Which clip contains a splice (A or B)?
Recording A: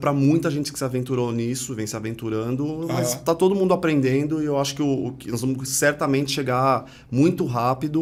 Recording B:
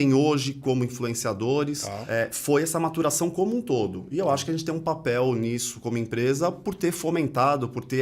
B